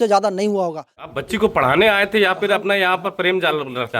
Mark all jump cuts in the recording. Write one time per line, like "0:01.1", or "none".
0:01.1